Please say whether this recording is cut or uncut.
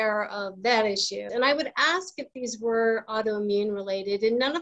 cut